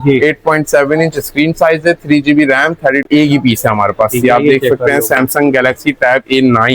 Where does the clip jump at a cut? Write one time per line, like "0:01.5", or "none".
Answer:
0:03.1